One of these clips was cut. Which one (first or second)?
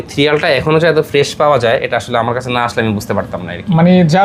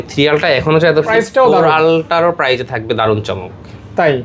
second